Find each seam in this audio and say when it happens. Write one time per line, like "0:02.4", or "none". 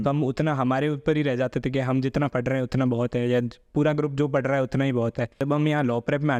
0:05.4